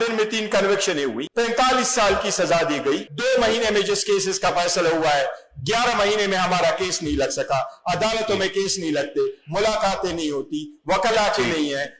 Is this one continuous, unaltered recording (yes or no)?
no